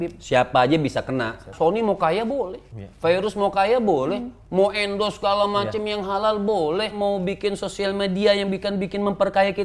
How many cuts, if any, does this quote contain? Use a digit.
2